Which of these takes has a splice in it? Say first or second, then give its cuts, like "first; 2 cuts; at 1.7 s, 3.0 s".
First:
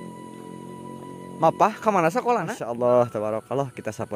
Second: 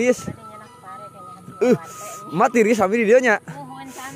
first; 1 cut; at 2.6 s